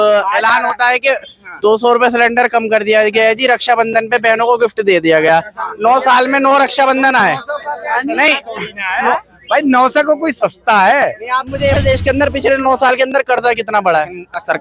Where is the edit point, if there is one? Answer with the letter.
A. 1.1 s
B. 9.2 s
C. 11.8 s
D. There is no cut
C